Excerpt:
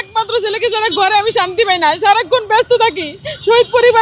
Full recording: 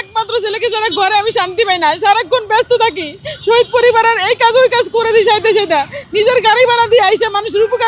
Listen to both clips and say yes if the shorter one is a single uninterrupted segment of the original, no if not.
yes